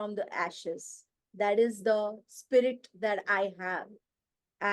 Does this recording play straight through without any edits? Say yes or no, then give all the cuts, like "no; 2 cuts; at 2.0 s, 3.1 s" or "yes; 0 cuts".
yes; 0 cuts